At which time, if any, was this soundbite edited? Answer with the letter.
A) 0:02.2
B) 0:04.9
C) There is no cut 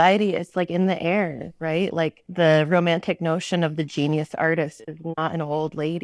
A